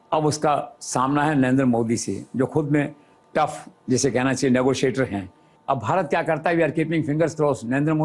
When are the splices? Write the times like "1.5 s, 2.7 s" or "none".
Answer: none